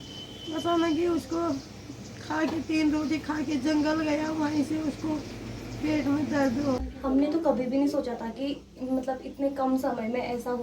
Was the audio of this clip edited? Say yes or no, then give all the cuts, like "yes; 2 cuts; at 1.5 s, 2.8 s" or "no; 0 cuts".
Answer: yes; 1 cut; at 6.9 s